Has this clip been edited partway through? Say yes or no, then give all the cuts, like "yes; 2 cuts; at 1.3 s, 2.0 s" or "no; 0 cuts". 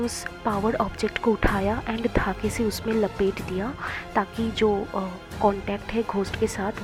no; 0 cuts